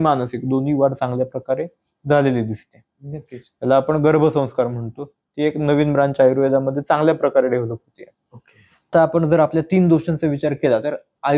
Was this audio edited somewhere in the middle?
no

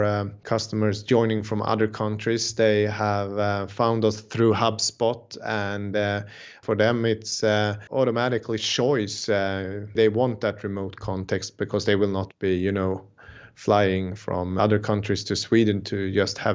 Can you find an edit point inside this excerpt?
yes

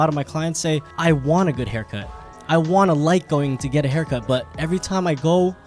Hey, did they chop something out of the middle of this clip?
yes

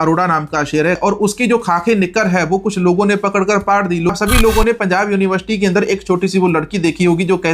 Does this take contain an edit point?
yes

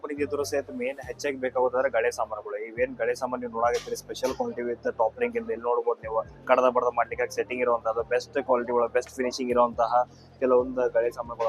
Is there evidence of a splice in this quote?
no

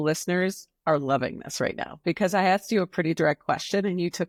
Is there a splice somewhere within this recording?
no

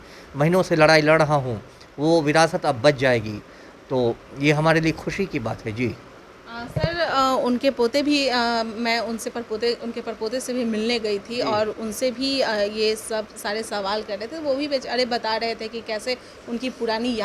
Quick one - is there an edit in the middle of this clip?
no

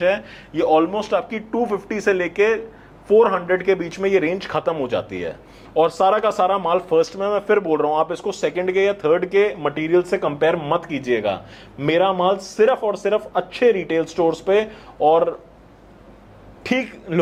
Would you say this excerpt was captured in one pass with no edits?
yes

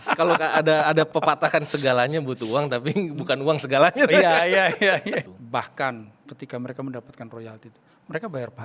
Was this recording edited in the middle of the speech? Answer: yes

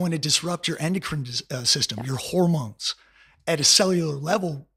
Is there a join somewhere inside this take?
no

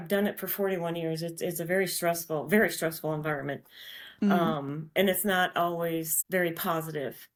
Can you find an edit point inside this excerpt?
no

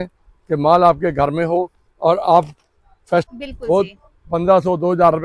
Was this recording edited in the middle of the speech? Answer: yes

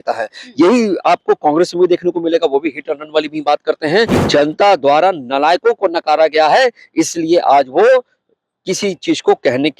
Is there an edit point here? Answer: yes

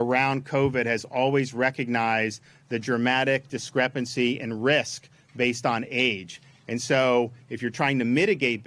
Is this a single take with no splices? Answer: yes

